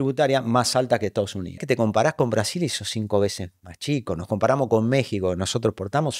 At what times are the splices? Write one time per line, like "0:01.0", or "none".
0:01.6